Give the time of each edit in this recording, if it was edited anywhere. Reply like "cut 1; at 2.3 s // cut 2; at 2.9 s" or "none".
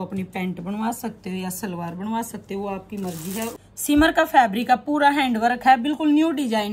cut 1; at 3.5 s

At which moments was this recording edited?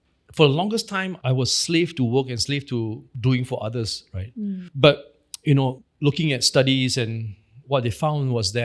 cut 1; at 3.1 s // cut 2; at 5.9 s

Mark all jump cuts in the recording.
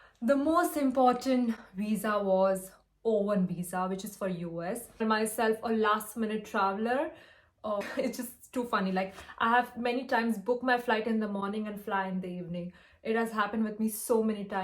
cut 1; at 5.0 s // cut 2; at 7.8 s

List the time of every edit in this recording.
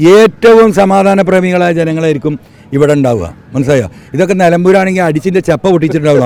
none

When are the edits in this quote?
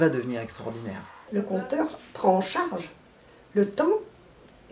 cut 1; at 1.2 s

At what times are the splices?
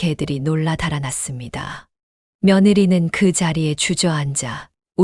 none

